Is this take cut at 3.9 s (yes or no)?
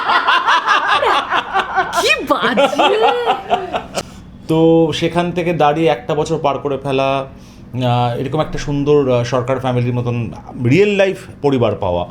yes